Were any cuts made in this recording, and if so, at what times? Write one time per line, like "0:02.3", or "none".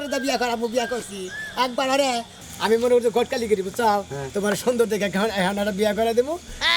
0:02.4